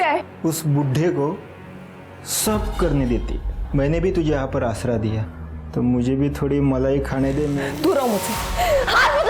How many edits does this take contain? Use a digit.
1